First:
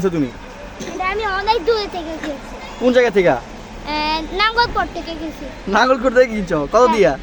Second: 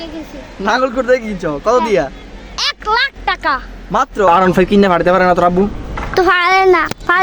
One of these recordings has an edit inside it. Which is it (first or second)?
second